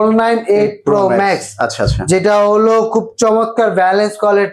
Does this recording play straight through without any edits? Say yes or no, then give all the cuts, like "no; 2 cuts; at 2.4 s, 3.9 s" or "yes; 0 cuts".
yes; 0 cuts